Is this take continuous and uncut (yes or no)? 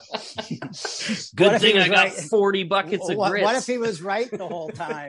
yes